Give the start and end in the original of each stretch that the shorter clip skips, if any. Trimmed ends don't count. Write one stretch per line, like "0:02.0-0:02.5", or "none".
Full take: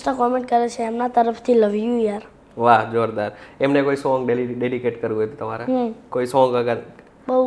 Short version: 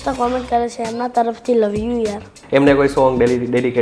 0:02.3-0:03.4